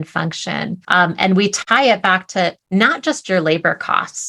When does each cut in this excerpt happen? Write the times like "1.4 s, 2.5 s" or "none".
0.8 s, 1.6 s